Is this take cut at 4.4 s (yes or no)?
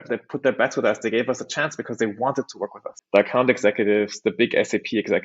no